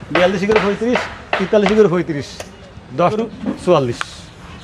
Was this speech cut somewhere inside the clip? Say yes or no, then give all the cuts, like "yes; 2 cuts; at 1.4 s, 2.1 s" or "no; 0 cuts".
yes; 1 cut; at 3.2 s